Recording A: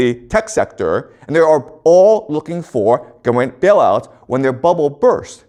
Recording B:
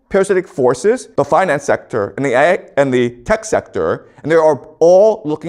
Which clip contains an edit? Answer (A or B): B